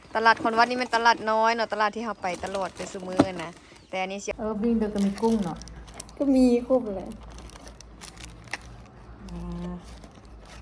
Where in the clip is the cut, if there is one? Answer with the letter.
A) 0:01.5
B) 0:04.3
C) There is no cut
B